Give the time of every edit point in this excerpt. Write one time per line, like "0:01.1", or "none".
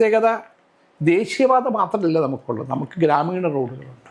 none